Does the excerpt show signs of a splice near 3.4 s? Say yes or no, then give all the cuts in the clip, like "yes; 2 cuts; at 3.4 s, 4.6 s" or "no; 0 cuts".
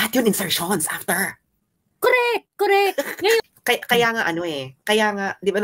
yes; 1 cut; at 3.4 s